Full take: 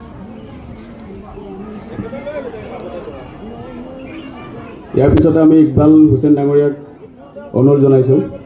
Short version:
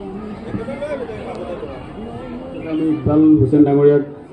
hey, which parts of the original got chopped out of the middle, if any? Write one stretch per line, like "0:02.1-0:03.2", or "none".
0:04.2-0:05.5